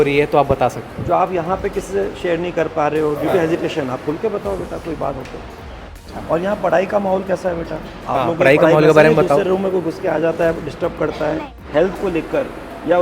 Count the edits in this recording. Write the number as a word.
two